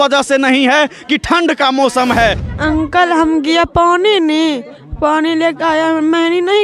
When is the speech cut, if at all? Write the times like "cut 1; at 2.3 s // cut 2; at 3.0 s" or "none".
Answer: cut 1; at 2.4 s